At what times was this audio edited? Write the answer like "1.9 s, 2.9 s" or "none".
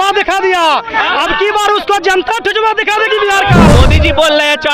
3.6 s